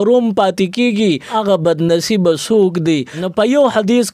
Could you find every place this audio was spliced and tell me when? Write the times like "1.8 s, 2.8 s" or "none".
1.3 s, 3.2 s